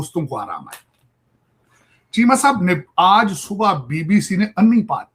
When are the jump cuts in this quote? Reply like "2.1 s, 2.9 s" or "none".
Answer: none